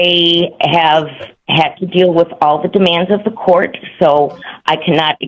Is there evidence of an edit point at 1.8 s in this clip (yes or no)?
no